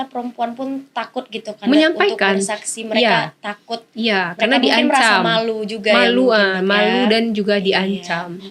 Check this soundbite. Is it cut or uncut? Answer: uncut